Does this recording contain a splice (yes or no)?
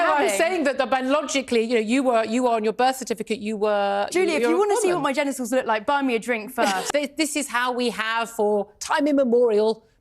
yes